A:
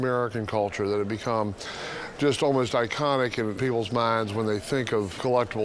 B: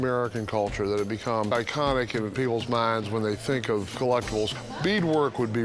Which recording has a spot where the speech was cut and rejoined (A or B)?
B